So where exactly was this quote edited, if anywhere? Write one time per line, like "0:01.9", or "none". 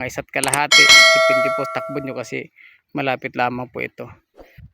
0:00.9
0:01.7